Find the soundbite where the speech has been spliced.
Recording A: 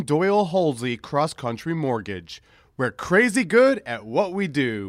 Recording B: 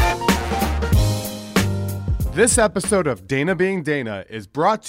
B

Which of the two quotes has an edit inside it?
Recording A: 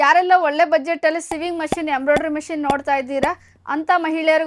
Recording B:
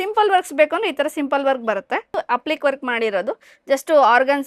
B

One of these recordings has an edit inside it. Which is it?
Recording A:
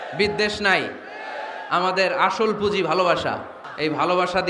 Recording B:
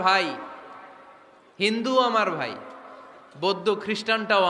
A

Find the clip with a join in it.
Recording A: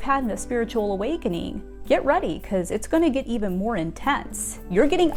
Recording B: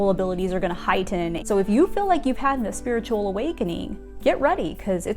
B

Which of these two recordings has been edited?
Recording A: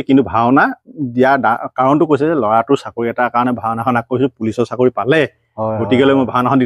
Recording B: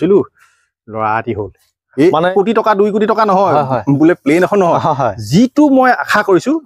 B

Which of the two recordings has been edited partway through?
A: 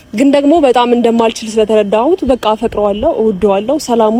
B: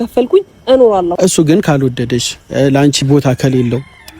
B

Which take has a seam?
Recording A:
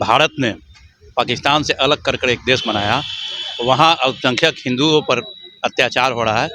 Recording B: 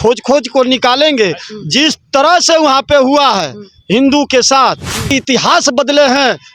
B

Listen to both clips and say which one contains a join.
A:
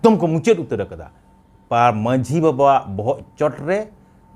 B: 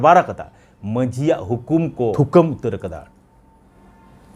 B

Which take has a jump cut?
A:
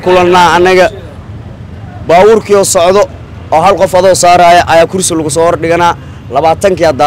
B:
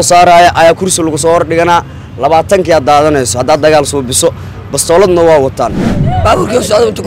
B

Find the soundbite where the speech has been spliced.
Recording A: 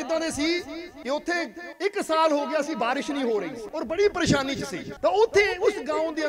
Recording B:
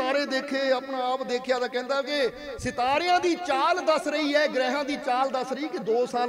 A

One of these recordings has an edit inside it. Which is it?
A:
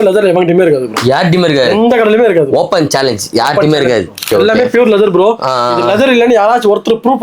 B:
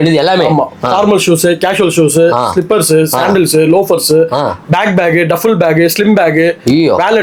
A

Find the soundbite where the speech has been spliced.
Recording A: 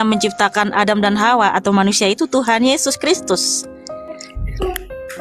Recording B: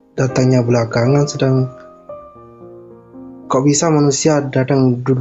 B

